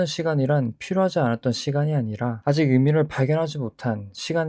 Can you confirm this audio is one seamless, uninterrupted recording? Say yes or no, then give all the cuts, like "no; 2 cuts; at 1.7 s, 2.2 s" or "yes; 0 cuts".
yes; 0 cuts